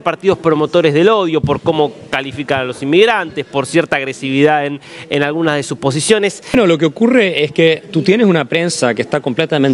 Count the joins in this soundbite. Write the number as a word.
one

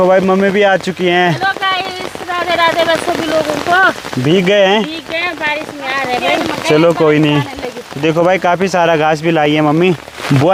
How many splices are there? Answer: zero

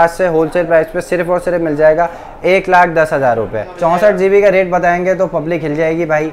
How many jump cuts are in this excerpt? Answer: one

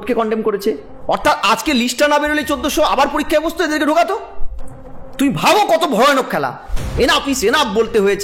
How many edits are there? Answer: one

